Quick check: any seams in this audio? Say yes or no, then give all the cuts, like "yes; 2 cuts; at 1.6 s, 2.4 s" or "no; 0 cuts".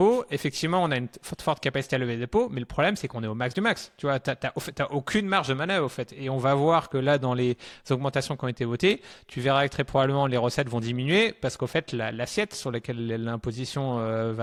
no; 0 cuts